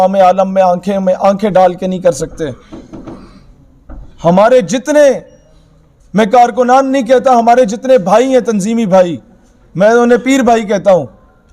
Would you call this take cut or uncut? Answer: uncut